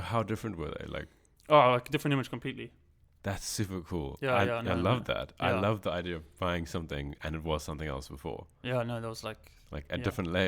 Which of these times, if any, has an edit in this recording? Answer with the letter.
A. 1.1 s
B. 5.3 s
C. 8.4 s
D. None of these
D